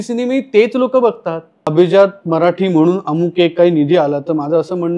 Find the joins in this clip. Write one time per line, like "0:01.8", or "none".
0:01.6